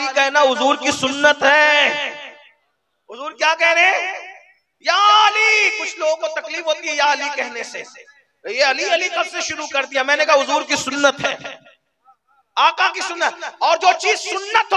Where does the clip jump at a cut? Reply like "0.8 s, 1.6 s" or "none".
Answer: none